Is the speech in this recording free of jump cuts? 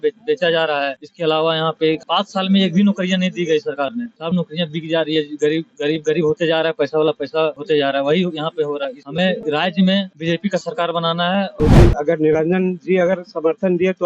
no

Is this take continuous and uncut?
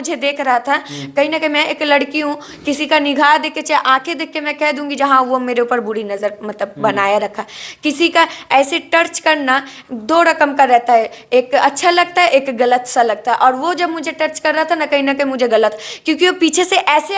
yes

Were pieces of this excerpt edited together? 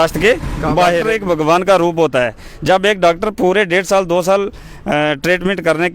yes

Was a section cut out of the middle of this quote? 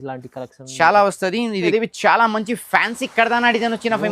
yes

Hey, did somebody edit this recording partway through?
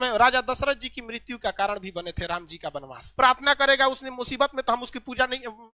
yes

